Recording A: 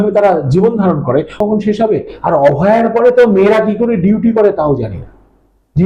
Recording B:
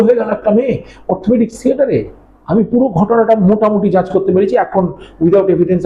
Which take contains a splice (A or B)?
A